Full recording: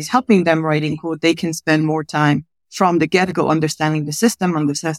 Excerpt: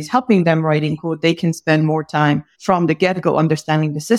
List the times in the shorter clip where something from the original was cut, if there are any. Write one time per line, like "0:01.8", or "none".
0:02.5

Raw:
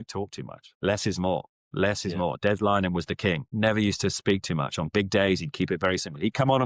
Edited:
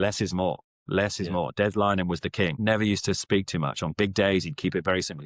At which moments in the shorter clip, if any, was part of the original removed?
0:02.6

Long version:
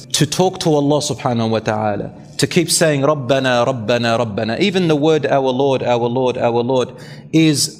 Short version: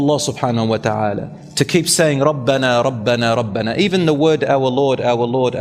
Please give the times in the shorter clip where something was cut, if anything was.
none

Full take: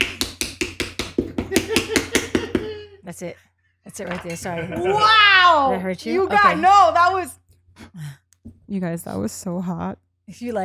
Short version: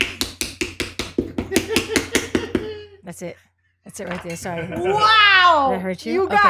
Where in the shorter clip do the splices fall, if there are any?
none

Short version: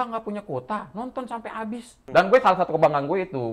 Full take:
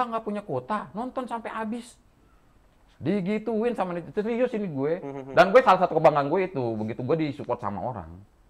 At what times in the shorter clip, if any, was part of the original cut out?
0:01.9

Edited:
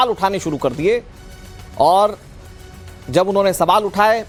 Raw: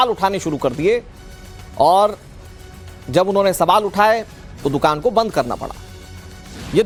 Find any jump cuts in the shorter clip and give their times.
none

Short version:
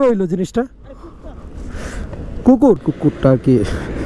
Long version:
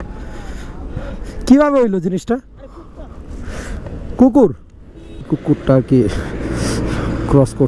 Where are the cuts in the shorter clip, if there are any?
0:02.9

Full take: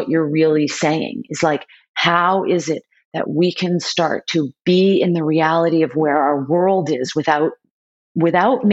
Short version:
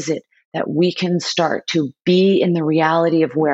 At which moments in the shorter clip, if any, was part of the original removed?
none

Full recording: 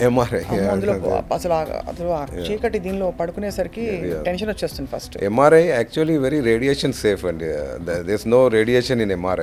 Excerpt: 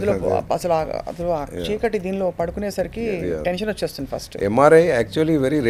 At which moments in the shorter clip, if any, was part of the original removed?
none

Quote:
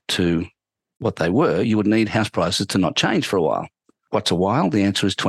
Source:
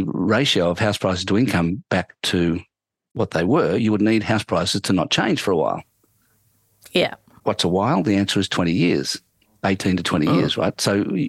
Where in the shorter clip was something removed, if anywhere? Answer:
0:03.9

